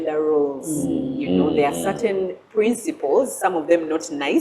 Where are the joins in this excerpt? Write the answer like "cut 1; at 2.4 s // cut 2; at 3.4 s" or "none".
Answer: none